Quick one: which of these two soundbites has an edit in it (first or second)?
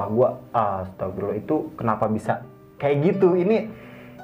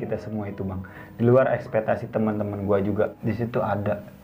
second